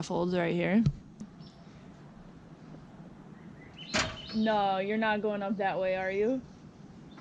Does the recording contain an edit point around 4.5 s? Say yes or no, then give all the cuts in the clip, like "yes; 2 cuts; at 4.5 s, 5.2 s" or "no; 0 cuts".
no; 1 cut; at 1.3 s